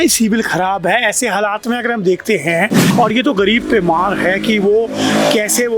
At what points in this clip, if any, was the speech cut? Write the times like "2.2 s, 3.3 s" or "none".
2.8 s